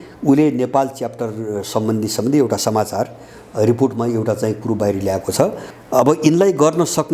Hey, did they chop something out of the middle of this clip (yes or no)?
yes